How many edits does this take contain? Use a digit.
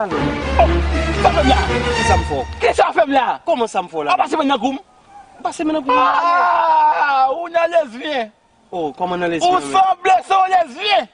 0